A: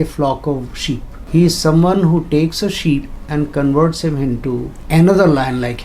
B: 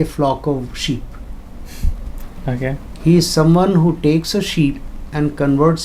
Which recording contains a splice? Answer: A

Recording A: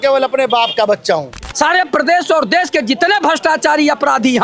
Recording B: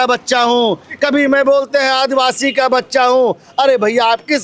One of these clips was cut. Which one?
A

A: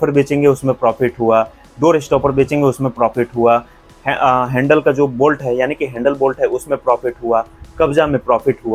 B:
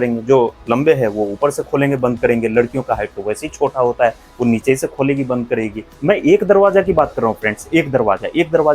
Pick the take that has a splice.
B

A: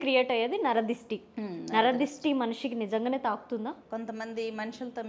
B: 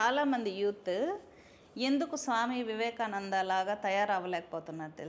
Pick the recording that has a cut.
A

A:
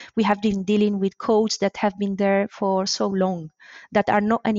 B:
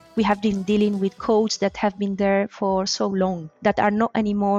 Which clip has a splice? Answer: B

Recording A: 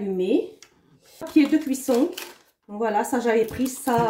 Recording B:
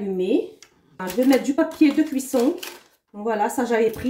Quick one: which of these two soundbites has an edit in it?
A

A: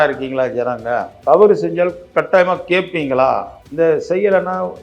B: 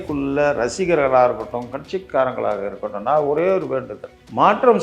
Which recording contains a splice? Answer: A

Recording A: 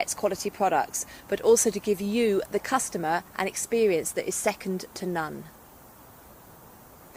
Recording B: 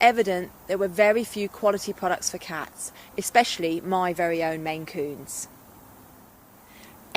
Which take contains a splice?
B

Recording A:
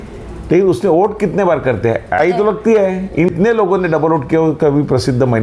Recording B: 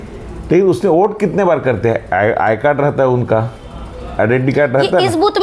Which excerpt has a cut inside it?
A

